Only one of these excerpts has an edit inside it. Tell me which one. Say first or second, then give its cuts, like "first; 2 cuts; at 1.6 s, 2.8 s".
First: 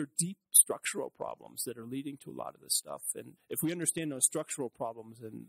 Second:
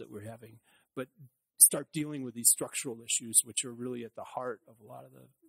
first; 1 cut; at 3.3 s